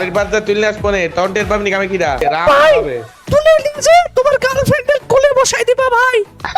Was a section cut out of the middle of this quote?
no; 0 cuts

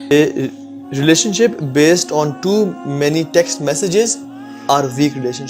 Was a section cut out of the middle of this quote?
no; 0 cuts

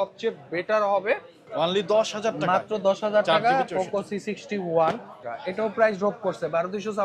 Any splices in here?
yes; 2 cuts; at 1.4 s, 5.2 s

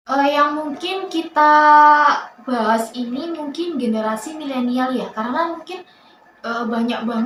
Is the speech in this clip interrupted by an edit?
no; 0 cuts

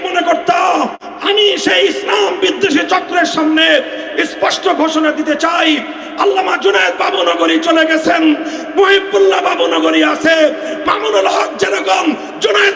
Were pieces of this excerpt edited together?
yes; 1 cut; at 1.1 s

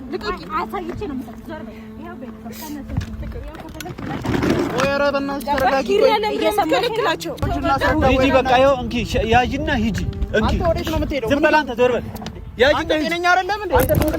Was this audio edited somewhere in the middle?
yes; 1 cut; at 7.7 s

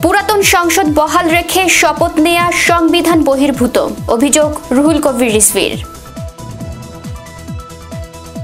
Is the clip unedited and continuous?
yes; 0 cuts

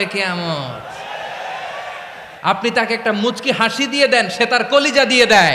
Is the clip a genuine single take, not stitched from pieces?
no; 1 cut; at 2.3 s

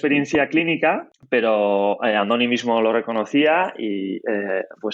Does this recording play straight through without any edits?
no; 1 cut; at 1.1 s

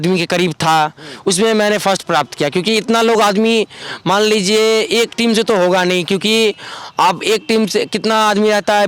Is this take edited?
no; 0 cuts

